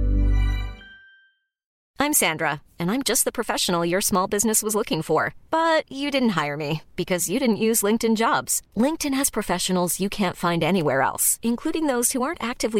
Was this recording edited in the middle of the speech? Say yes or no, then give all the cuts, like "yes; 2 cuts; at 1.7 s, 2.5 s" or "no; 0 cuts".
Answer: yes; 1 cut; at 1.8 s